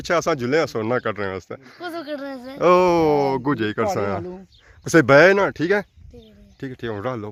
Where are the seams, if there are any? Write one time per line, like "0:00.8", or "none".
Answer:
none